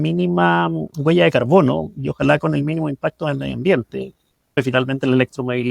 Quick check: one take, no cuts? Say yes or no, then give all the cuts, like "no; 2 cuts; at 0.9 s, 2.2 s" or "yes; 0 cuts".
no; 1 cut; at 4.6 s